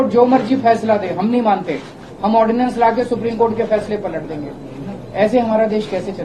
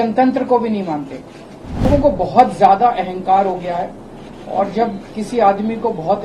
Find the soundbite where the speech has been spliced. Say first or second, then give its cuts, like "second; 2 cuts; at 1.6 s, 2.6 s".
second; 1 cut; at 1.9 s